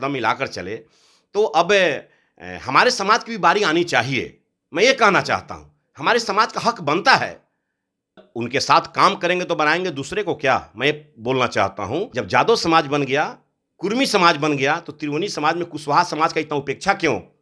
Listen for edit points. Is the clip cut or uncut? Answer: cut